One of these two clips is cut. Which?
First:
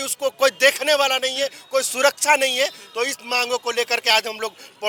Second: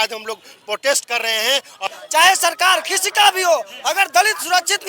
second; 1 cut; at 1.8 s

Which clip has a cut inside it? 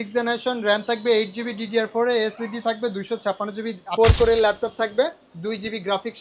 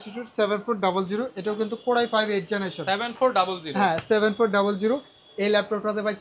first; 1 cut; at 3.9 s

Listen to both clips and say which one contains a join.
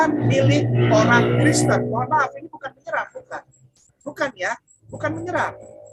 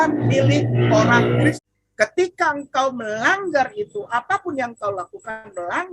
second; 1 cut; at 1.5 s

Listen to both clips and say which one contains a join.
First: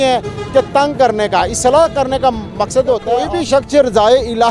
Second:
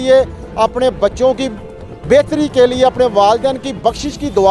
first; 1 cut; at 3.3 s

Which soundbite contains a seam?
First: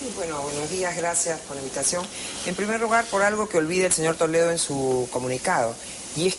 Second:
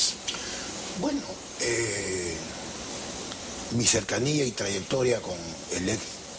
first; 1 cut; at 1.2 s

